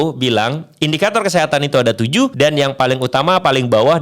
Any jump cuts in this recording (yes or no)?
yes